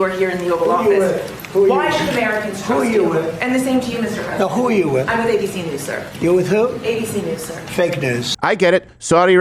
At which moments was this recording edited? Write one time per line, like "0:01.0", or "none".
0:08.3

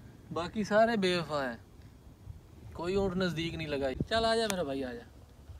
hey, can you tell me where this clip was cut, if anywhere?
0:04.0

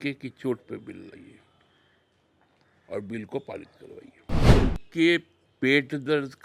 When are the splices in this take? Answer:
0:04.3

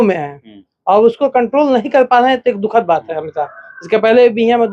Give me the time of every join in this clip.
none

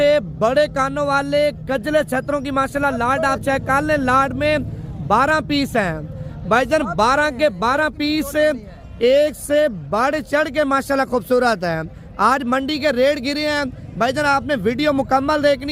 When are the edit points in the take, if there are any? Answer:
none

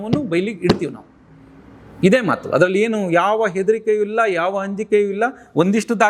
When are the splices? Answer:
none

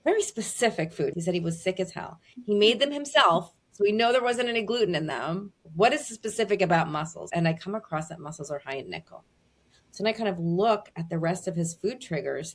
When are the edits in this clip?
0:01.1
0:05.6
0:07.3

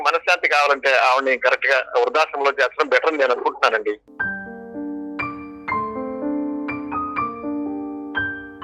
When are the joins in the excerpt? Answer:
0:04.1

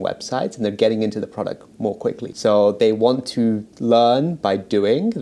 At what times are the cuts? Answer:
0:02.3

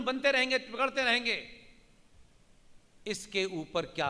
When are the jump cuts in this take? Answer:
none

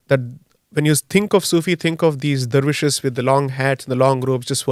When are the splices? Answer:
none

